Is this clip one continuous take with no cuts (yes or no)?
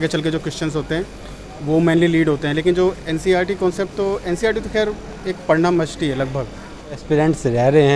no